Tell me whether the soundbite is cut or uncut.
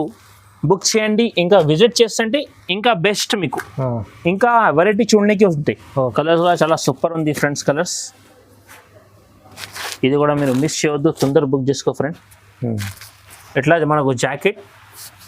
cut